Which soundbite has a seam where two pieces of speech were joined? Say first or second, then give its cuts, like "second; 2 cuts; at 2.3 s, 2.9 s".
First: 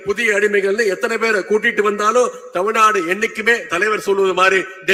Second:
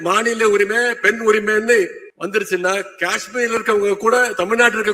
second; 1 cut; at 2.1 s